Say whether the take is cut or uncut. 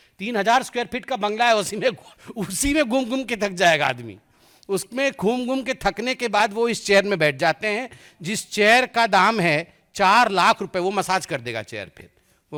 uncut